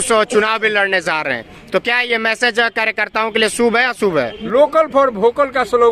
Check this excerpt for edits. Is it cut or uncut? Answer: cut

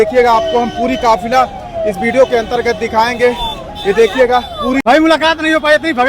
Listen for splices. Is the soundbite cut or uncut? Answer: cut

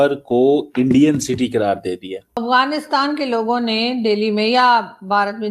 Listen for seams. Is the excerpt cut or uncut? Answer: cut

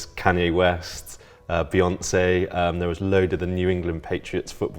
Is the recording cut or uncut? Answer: uncut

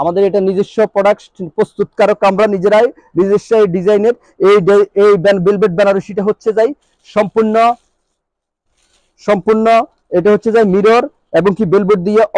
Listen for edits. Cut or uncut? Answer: uncut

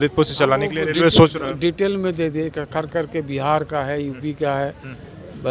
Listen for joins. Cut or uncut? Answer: uncut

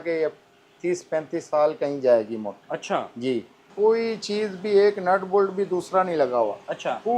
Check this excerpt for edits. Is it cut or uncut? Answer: cut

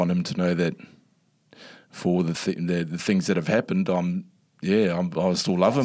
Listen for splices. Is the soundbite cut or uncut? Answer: uncut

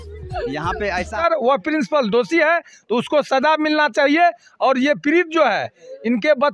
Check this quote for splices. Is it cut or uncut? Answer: cut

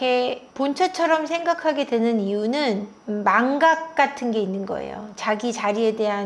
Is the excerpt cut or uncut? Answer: uncut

